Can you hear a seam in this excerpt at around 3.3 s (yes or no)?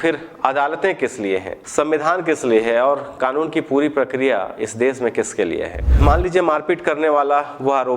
no